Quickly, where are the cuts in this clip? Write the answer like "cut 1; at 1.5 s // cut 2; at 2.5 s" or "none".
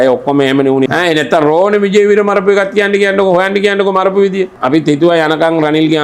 cut 1; at 0.9 s // cut 2; at 4.5 s